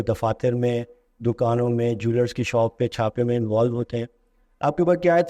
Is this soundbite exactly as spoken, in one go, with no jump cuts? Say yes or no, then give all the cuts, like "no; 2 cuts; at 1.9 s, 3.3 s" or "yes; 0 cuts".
yes; 0 cuts